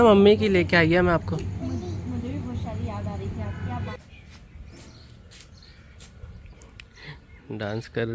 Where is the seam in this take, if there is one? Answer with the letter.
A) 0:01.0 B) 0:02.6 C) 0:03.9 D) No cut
C